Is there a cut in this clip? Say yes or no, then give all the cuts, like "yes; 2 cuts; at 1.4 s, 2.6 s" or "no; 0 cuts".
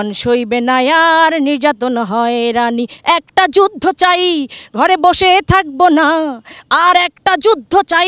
no; 0 cuts